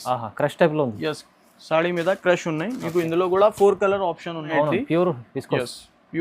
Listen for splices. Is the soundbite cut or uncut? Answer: cut